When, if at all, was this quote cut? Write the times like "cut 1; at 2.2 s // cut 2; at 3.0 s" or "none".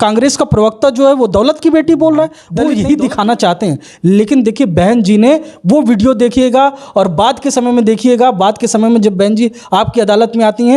cut 1; at 2.6 s